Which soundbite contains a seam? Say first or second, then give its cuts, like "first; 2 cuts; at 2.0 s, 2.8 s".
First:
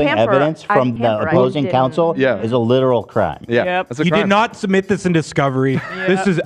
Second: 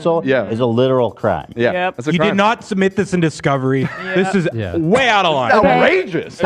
first; 1 cut; at 0.9 s